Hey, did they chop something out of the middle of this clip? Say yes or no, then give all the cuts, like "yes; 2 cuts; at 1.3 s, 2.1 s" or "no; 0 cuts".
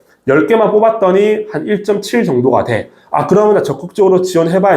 no; 0 cuts